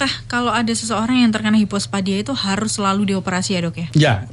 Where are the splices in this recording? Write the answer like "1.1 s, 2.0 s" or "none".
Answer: none